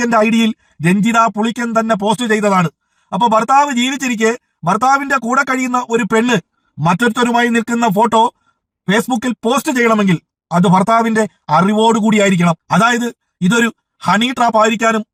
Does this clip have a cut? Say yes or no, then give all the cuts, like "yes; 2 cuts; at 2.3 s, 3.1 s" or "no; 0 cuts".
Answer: no; 0 cuts